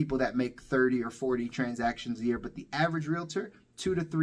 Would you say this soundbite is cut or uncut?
uncut